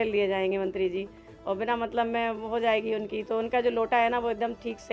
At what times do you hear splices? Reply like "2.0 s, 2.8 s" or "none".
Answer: none